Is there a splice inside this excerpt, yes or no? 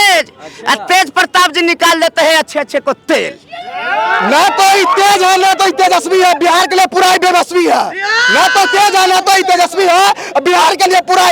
no